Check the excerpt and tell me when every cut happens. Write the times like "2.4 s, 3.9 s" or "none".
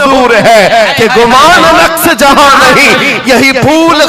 none